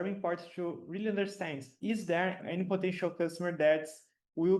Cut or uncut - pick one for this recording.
uncut